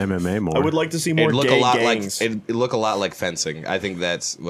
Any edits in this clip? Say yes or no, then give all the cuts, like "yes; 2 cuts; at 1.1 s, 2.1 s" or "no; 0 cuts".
no; 0 cuts